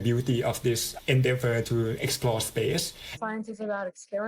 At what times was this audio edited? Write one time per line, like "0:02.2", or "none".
0:03.0